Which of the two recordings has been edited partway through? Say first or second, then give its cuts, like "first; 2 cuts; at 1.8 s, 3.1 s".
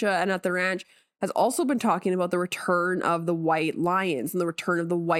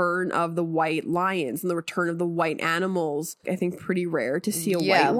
second; 1 cut; at 3.4 s